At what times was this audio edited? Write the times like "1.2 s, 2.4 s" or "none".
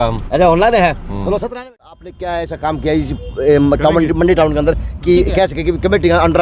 1.7 s